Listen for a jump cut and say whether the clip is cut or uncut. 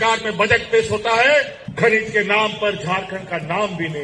cut